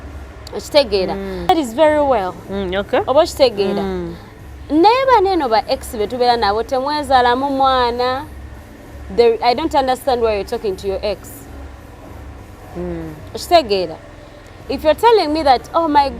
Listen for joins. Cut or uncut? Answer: cut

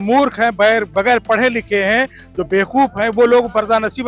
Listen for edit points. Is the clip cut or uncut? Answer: uncut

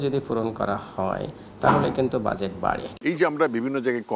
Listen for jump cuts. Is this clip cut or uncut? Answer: cut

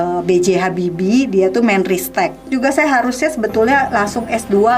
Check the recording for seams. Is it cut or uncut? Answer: cut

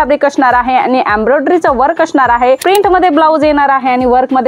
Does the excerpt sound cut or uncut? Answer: cut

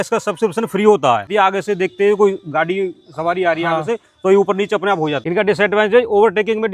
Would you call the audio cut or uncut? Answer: cut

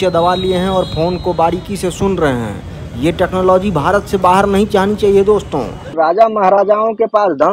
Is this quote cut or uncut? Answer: cut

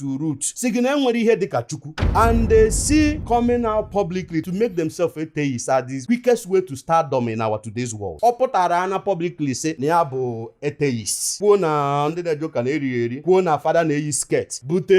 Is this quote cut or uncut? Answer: uncut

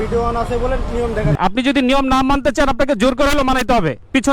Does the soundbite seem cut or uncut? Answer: cut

